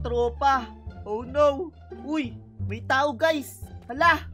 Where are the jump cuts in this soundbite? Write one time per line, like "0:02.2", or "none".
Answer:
0:02.1